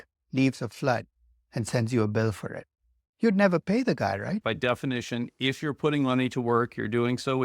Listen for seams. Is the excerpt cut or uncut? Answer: cut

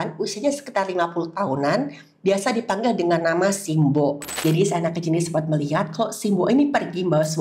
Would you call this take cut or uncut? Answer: cut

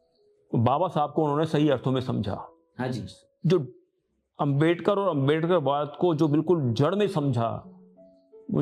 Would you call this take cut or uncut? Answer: uncut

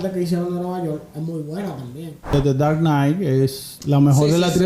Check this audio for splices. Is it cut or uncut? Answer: cut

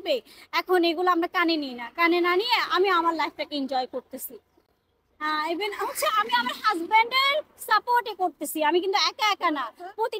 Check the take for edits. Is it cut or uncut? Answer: uncut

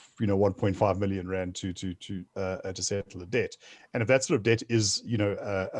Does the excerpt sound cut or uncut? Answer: uncut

